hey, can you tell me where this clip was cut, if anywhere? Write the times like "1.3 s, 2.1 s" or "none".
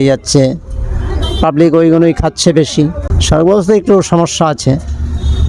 3.1 s